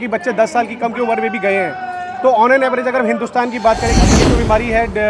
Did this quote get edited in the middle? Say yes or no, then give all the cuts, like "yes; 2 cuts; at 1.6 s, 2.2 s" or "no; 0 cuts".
yes; 1 cut; at 4.1 s